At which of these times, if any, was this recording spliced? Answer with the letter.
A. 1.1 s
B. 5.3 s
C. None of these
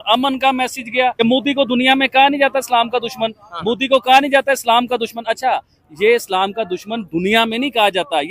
A